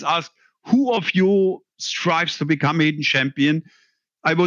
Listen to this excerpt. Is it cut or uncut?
uncut